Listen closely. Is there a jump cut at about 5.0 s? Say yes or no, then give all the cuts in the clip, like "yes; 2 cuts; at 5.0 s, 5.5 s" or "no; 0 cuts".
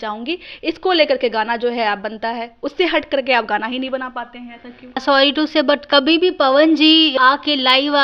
yes; 1 cut; at 5.0 s